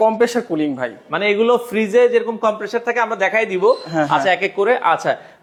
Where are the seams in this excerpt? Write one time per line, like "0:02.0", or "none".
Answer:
none